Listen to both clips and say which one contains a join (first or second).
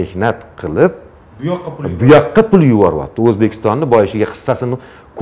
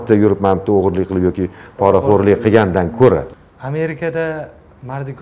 second